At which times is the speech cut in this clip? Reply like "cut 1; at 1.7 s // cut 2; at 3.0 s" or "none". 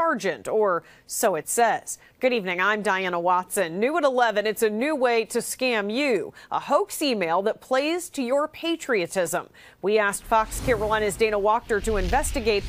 none